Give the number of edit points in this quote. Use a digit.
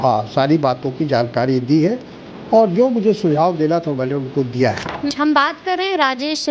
1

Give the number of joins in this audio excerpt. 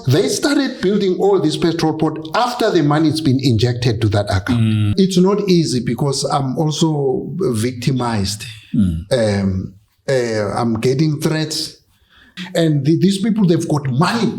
2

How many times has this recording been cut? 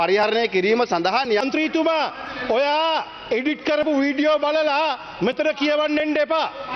1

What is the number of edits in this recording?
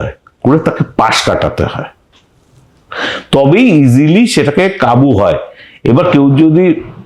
0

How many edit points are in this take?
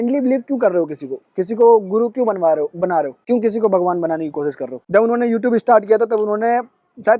2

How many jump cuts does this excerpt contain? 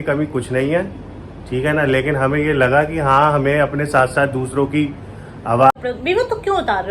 1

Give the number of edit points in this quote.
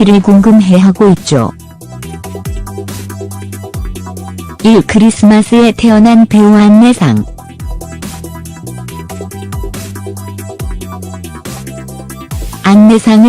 1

